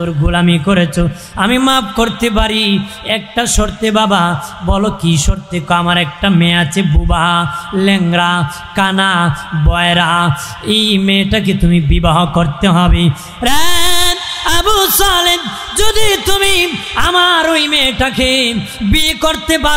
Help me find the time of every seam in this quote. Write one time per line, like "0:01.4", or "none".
none

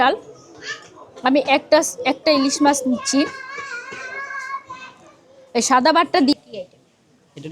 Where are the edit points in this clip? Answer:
0:06.3

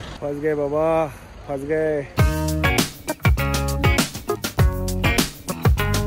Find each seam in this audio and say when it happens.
0:02.2

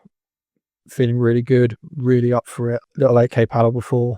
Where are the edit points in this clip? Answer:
0:02.8

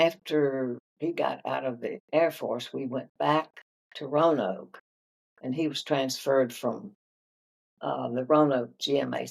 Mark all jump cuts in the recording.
0:00.9
0:02.0

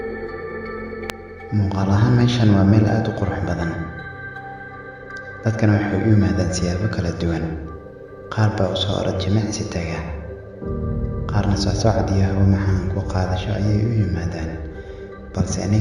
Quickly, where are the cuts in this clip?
0:06.0

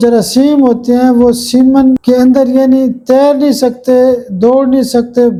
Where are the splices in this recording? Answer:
none

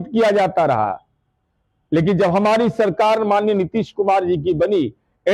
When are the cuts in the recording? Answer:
none

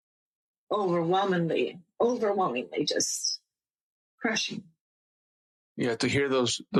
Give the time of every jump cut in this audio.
none

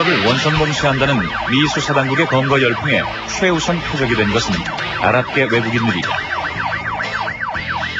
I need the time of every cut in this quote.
0:05.1

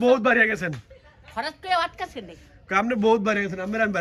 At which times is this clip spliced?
none

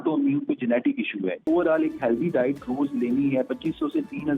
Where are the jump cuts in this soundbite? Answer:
0:01.4

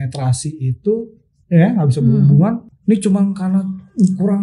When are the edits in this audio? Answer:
0:02.7

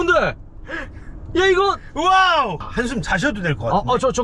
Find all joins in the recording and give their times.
0:02.6

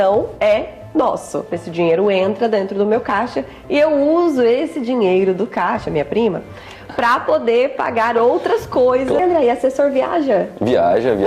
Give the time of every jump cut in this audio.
0:01.6
0:09.2

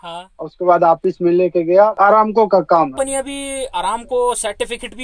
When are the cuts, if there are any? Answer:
0:01.9
0:03.0

